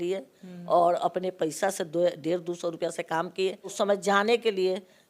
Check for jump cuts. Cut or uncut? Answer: cut